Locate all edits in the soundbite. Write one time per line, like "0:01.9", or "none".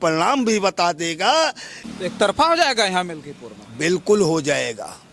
0:01.8